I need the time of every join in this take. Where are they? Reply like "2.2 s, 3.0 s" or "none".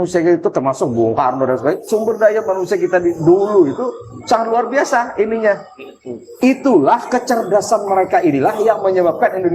none